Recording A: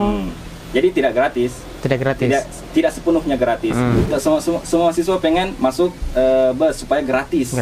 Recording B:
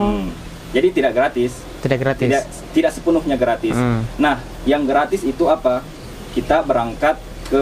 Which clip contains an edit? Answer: A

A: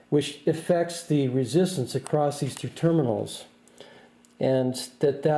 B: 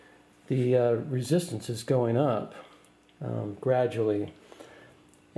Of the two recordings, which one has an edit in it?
A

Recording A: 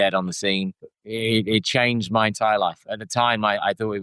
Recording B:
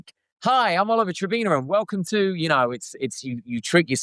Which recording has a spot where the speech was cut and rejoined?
A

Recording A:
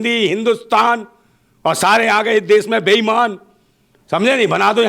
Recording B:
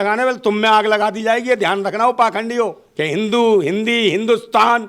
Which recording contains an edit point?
B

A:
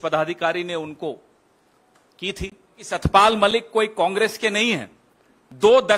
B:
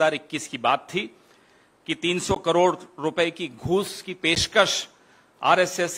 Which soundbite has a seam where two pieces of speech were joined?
A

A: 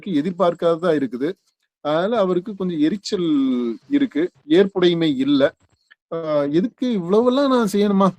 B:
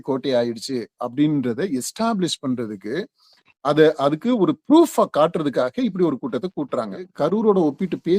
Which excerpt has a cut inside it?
B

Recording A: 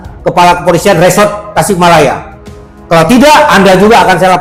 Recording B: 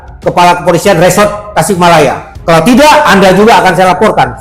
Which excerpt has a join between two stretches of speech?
B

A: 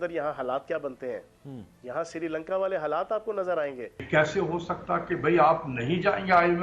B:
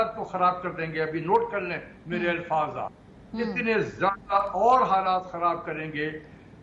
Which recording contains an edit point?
A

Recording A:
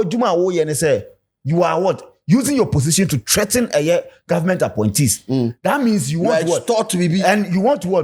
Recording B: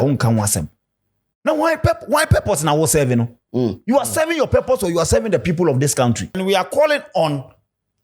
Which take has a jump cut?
B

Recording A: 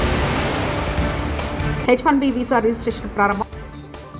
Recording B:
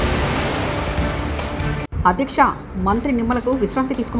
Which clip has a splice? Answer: B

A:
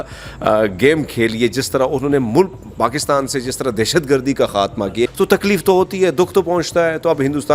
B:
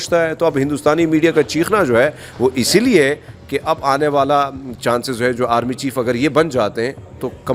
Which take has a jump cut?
A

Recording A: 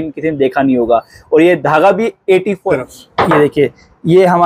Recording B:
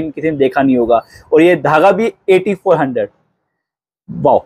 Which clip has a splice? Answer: A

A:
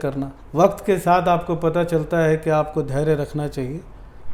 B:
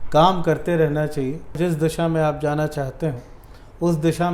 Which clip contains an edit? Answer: B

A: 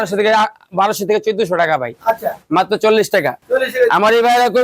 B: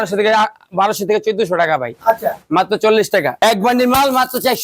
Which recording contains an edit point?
B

